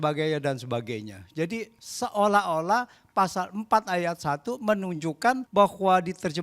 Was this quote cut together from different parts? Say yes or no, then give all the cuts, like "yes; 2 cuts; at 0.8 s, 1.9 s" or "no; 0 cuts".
yes; 2 cuts; at 1.8 s, 5.4 s